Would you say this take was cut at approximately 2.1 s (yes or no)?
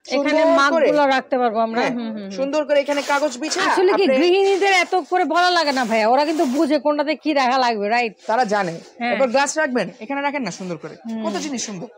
no